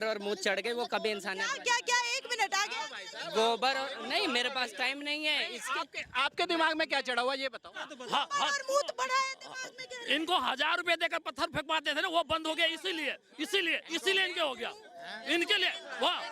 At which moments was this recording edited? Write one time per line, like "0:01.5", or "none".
0:07.9